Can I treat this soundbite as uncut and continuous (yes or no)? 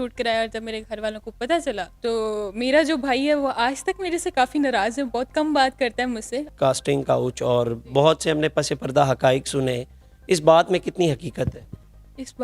no